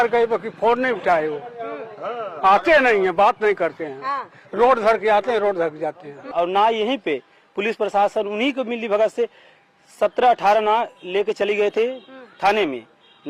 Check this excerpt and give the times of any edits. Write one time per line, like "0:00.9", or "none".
0:06.3